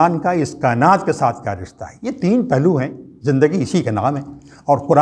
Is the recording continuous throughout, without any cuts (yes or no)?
yes